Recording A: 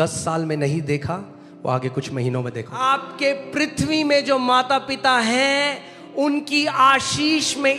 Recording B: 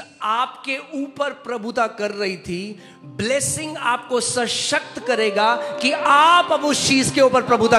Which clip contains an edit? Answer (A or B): A